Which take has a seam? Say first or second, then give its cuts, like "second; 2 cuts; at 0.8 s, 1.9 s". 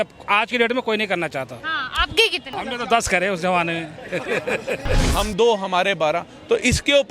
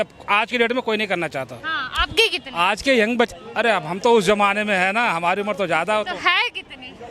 first; 2 cuts; at 2.5 s, 5.0 s